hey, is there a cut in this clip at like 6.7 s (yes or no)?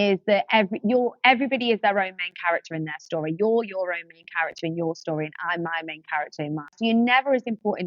yes